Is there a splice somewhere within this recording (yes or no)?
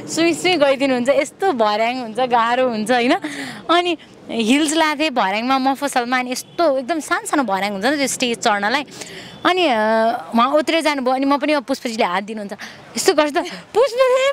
no